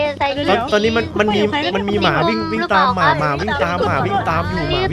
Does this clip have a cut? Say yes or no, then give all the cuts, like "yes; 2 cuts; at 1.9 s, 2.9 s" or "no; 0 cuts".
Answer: no; 0 cuts